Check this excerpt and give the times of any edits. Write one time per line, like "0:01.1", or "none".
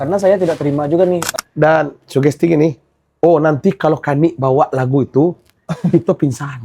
0:01.3